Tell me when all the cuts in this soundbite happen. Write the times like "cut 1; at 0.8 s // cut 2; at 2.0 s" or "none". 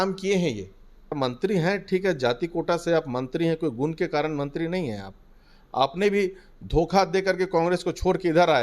cut 1; at 1.1 s